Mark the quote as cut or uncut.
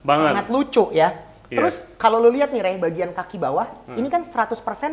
uncut